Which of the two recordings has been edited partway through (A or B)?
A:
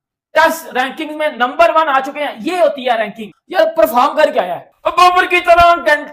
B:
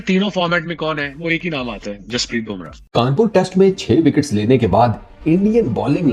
B